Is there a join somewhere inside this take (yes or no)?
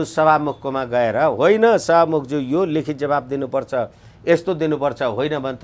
no